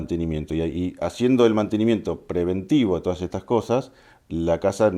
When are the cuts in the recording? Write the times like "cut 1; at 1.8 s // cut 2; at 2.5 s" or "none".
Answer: none

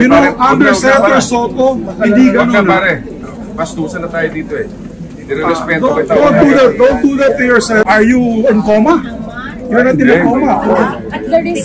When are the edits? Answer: cut 1; at 6.2 s

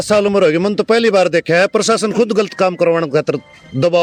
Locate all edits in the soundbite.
none

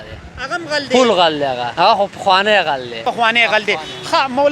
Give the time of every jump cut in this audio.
cut 1; at 1.7 s // cut 2; at 3.0 s

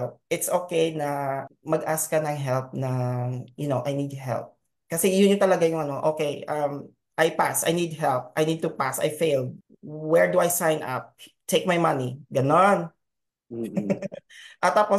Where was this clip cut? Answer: none

